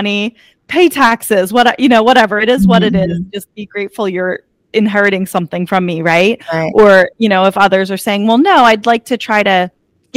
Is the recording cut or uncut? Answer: uncut